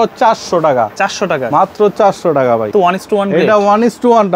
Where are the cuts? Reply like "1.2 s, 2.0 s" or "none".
2.7 s